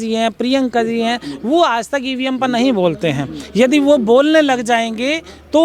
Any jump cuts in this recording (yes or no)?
no